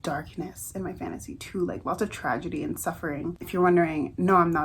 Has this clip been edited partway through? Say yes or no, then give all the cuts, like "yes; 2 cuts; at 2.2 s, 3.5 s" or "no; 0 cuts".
no; 0 cuts